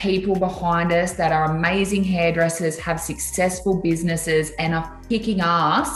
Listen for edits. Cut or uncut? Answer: cut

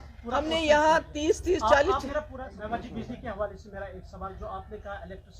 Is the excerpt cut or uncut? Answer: cut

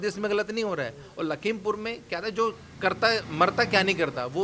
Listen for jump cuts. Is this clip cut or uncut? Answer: uncut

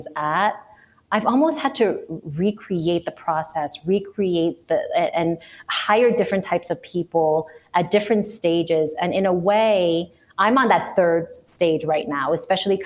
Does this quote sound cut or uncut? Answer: uncut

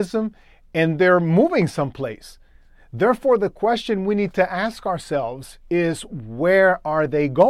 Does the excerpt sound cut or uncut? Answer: uncut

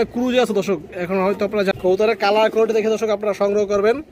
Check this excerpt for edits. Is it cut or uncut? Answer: cut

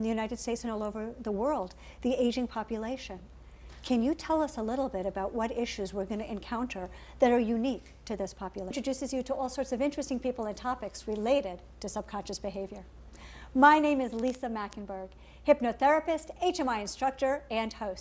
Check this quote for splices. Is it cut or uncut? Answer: uncut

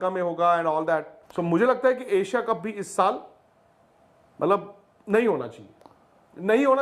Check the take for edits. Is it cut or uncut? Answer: cut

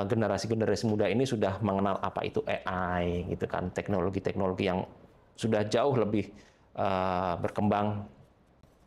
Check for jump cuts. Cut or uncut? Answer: uncut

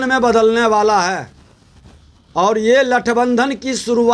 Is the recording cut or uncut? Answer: uncut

